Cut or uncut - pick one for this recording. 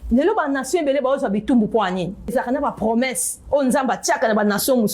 cut